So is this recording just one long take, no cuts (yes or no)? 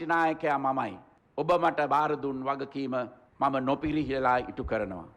yes